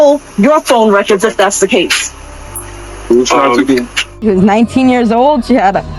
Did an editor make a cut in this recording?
yes; 1 cut; at 4.2 s

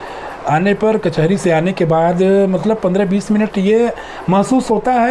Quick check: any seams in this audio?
no; 0 cuts

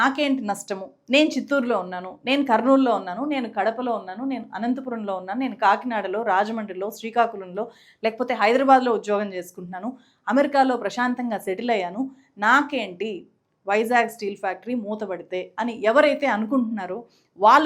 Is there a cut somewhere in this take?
no; 0 cuts

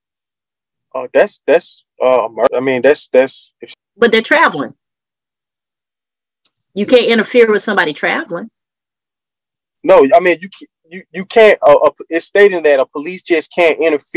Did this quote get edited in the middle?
yes; 2 cuts; at 2.5 s, 3.6 s

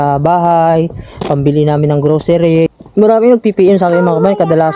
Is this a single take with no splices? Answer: no; 1 cut; at 2.7 s

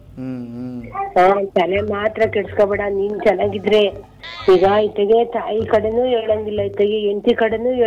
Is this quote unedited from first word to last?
yes; 0 cuts

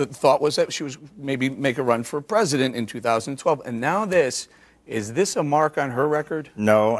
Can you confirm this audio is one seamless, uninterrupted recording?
yes; 0 cuts

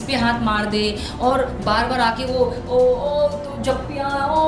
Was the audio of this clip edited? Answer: no; 0 cuts

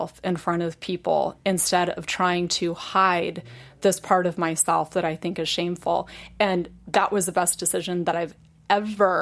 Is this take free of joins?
yes; 0 cuts

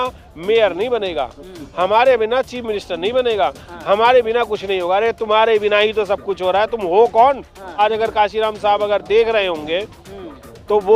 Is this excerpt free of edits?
no; 1 cut; at 7.8 s

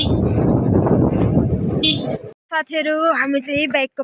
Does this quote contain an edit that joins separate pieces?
yes; 1 cut; at 2.3 s

